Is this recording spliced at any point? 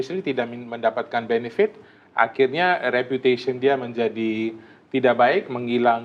no; 0 cuts

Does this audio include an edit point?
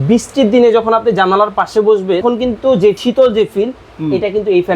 yes; 2 cuts; at 2.2 s, 3.0 s

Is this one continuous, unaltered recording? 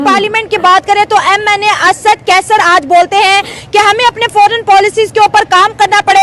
yes; 0 cuts

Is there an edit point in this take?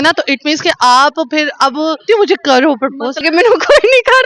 yes; 2 cuts; at 2.0 s, 3.2 s

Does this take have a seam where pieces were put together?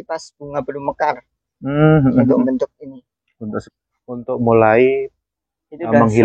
yes; 1 cut; at 3.7 s

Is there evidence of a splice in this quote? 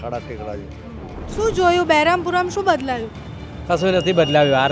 yes; 1 cut; at 1.3 s

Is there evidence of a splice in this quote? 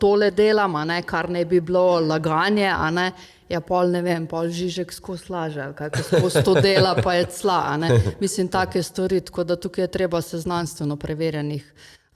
no; 0 cuts

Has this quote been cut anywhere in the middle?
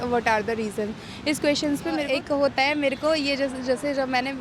yes; 1 cut; at 2.0 s

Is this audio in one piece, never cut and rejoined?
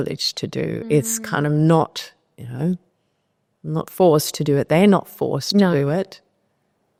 yes; 0 cuts

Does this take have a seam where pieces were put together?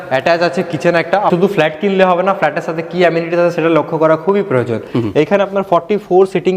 yes; 2 cuts; at 1.3 s, 4.9 s

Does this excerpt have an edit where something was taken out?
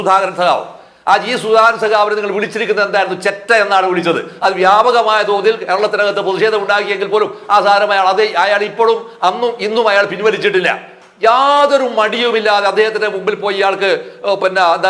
no; 0 cuts

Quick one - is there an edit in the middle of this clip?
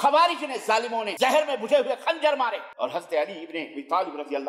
yes; 2 cuts; at 1.1 s, 2.7 s

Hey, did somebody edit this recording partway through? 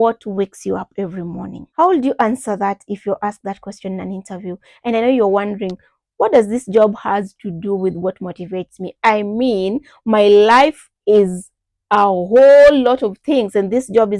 yes; 1 cut; at 1.6 s

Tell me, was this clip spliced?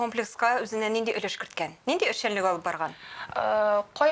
no; 0 cuts

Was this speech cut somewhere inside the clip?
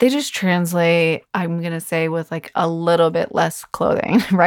yes; 1 cut; at 1.3 s

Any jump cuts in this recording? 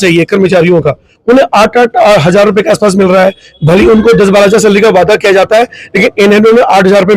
no; 0 cuts

